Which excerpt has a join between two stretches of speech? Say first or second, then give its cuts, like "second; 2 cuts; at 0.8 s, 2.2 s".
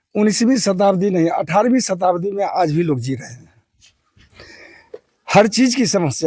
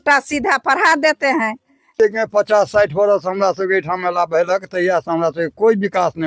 second; 1 cut; at 2.0 s